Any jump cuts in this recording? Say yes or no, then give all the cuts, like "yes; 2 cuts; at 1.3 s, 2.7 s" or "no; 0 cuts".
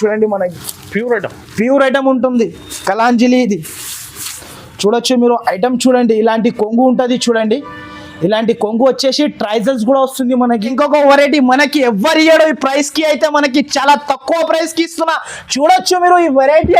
yes; 1 cut; at 10.7 s